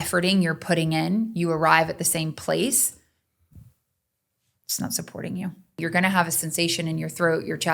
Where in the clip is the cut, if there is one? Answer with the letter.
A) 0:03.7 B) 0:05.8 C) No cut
B